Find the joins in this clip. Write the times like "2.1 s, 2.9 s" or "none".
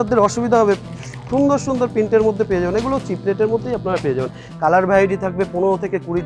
4.5 s